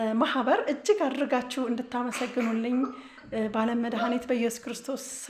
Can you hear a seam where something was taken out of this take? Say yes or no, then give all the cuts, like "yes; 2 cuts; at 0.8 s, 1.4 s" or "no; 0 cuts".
no; 0 cuts